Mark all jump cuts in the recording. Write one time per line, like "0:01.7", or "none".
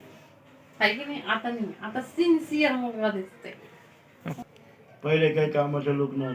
0:04.4